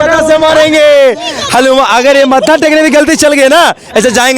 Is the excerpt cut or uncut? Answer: uncut